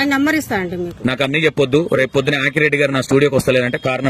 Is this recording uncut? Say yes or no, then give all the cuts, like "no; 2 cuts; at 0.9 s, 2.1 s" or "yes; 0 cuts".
no; 1 cut; at 0.9 s